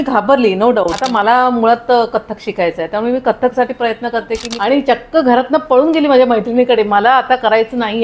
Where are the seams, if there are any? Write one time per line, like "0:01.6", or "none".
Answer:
0:01.0
0:04.5